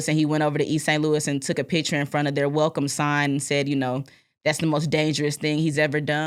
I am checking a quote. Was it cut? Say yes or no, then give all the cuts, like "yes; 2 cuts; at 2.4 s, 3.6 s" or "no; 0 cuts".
no; 0 cuts